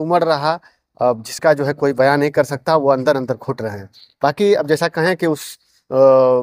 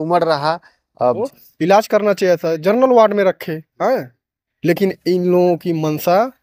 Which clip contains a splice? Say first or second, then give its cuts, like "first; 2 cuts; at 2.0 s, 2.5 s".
second; 1 cut; at 1.3 s